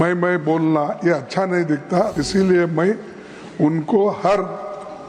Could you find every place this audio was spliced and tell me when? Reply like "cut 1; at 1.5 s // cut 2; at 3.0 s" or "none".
cut 1; at 2.2 s